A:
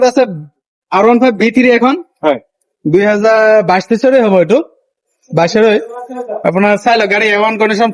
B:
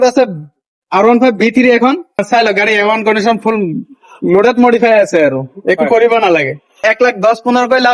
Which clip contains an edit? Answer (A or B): B